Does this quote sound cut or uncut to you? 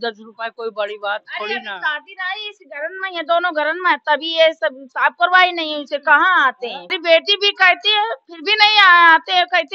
cut